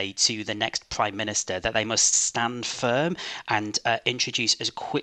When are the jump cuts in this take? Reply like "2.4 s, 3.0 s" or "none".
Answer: none

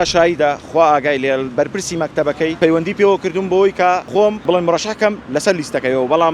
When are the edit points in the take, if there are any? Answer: 2.5 s, 4.4 s

